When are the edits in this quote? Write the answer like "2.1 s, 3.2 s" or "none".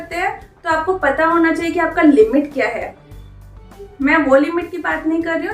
none